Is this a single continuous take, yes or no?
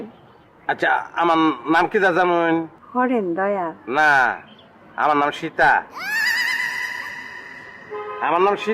no